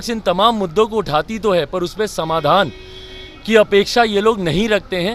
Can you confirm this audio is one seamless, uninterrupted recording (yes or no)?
yes